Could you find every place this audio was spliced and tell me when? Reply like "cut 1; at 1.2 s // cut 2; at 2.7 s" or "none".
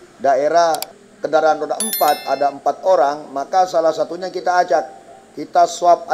cut 1; at 0.9 s

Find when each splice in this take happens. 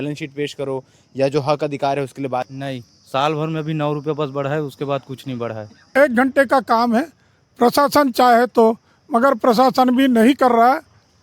cut 1; at 2.6 s // cut 2; at 5.9 s

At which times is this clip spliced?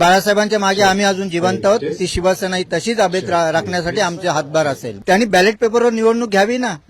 cut 1; at 5.0 s

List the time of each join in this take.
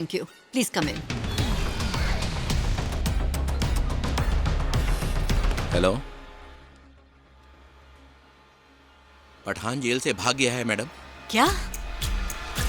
none

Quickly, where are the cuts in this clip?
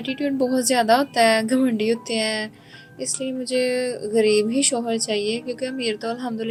none

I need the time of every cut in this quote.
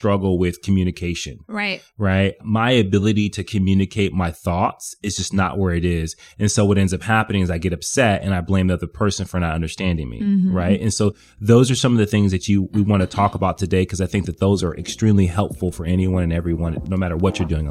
cut 1; at 16.8 s

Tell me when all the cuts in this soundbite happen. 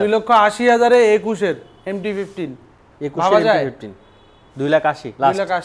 none

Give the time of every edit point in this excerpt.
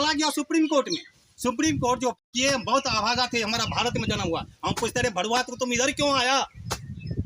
cut 1; at 2.3 s

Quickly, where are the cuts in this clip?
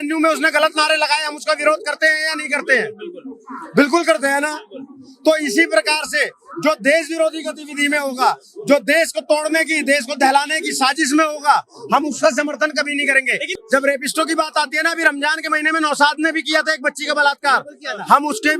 cut 1; at 13.5 s

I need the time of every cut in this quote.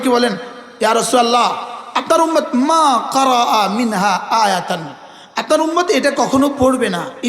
none

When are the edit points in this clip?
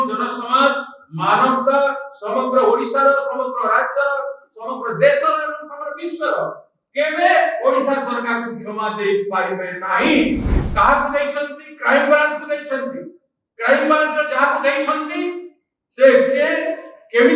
cut 1; at 10.6 s

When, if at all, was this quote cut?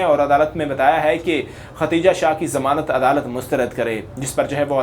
none

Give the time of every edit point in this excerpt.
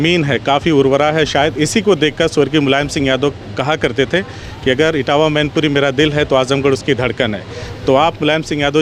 none

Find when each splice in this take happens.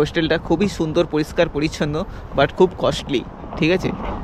none

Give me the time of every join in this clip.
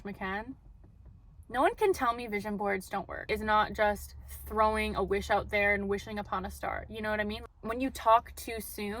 cut 1; at 3.2 s // cut 2; at 7.4 s

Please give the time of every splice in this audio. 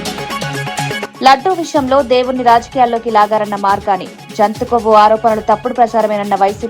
cut 1; at 1.1 s

